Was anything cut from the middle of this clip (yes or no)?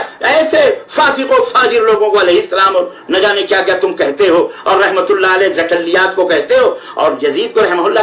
no